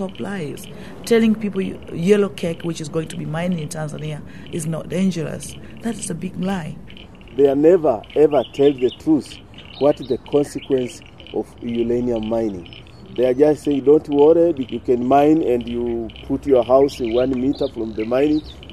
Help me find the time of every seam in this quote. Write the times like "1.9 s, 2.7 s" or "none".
6.9 s, 14.6 s

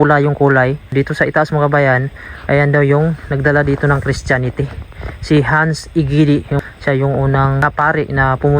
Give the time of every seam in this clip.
0.9 s, 6.6 s, 7.6 s

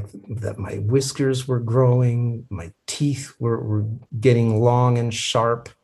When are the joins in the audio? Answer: 4.0 s

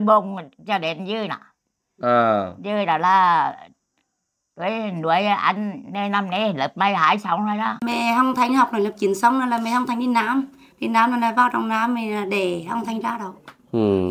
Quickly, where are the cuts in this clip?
7.8 s

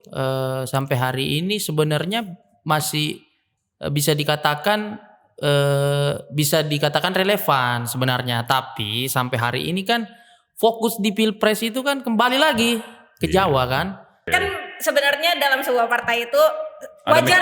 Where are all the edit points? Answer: 14.2 s

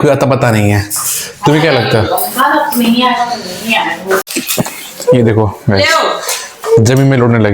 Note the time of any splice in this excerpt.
4.3 s

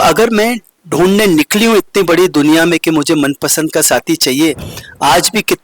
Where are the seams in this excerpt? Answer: 4.7 s

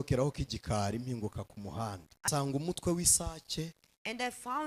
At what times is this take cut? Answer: 2.3 s

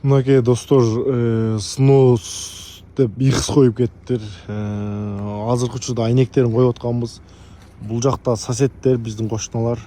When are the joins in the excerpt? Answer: none

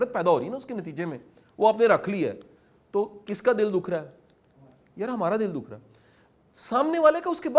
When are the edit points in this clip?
none

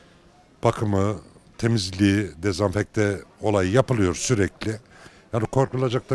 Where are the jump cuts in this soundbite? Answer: none

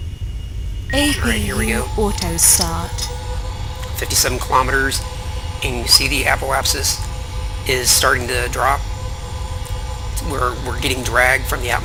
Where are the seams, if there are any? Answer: none

